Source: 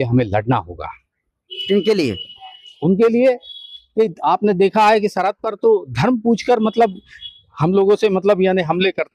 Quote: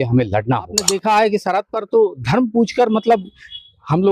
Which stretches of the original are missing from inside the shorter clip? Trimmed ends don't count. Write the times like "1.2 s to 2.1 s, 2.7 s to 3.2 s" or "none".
0.9 s to 4.6 s